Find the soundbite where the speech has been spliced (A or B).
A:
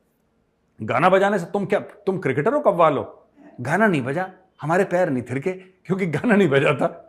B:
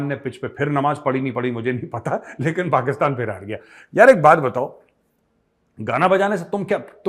A